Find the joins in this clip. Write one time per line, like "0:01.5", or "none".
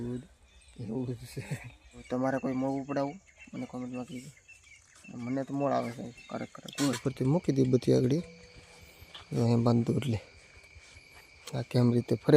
0:02.0
0:07.0